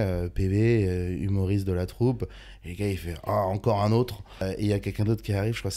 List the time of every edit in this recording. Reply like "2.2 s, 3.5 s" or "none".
4.4 s